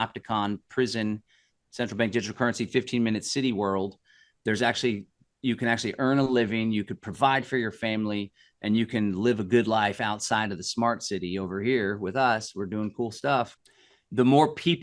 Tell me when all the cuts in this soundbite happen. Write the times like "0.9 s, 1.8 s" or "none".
13.6 s